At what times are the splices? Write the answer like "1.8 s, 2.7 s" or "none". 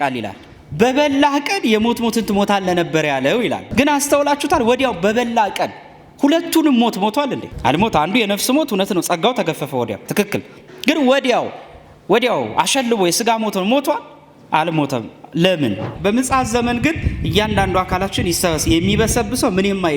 3.6 s, 7.5 s, 15.8 s

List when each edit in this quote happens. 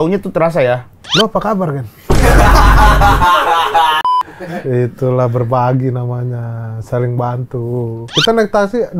4.1 s

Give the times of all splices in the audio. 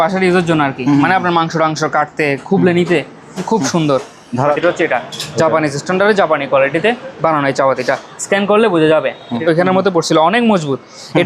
4.6 s, 9.4 s

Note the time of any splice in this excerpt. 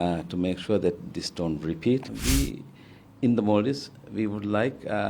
2.1 s

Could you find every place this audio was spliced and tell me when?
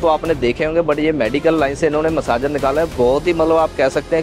none

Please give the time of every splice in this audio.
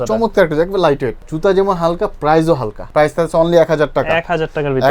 1.2 s, 2.8 s

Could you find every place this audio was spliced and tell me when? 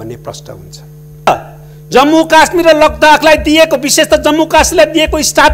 1.3 s

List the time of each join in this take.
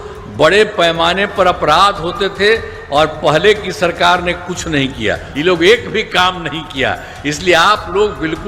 5.3 s

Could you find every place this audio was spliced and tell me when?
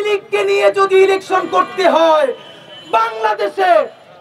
none

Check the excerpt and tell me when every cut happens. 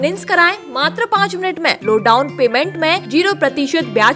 1.8 s, 3.0 s

